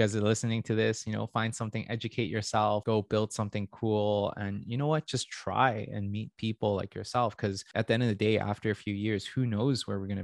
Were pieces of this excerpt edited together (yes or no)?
yes